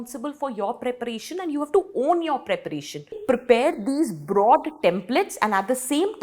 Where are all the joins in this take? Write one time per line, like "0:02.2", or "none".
0:03.2